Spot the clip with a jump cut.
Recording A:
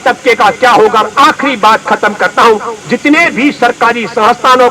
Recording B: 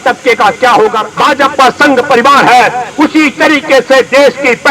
B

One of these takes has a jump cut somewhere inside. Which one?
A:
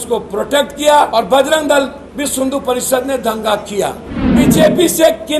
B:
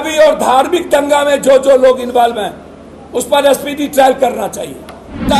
A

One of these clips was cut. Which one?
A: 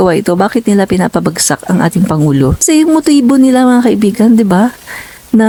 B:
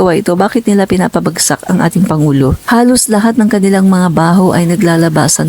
B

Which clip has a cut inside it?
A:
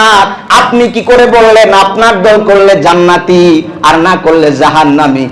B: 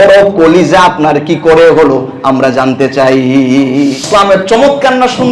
B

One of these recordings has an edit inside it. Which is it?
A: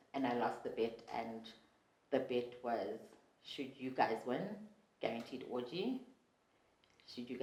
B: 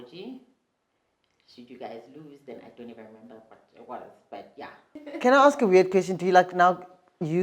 B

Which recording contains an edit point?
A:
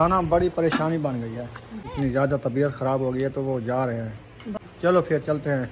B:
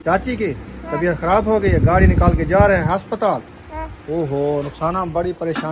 A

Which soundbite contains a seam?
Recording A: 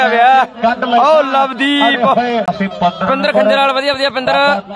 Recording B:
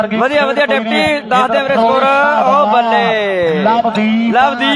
A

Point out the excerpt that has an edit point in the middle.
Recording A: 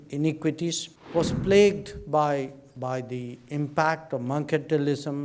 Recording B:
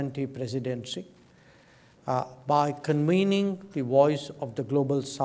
A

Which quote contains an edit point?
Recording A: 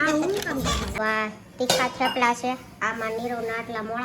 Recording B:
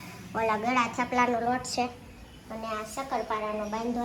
A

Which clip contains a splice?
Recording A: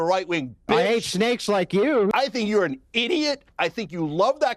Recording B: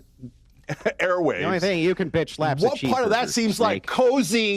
A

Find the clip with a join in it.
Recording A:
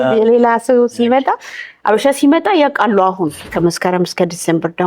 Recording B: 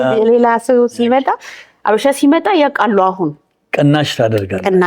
A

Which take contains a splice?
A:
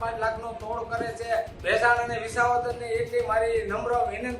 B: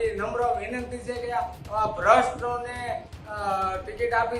A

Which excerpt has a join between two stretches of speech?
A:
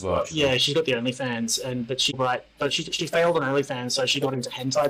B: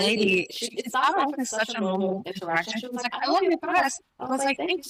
A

